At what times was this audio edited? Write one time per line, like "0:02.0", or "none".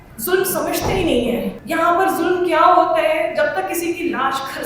0:01.6

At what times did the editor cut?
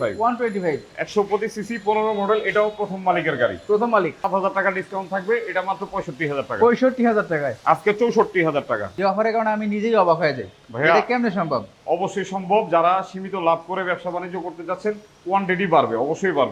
0:04.3
0:08.9

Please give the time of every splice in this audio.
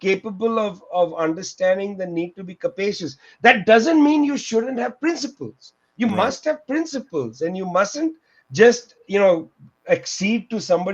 none

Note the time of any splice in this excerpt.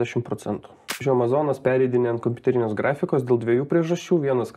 0:01.0

